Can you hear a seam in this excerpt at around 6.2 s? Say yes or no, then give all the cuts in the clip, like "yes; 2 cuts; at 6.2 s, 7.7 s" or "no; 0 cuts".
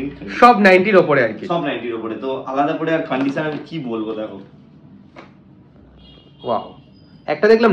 no; 0 cuts